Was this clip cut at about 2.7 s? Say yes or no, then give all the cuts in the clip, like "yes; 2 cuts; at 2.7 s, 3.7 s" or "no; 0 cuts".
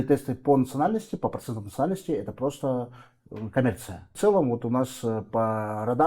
no; 1 cut; at 4.1 s